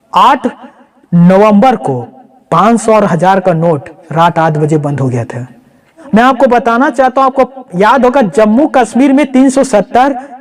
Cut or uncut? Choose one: cut